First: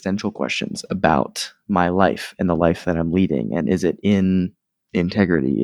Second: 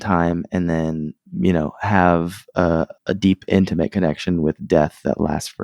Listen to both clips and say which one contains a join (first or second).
second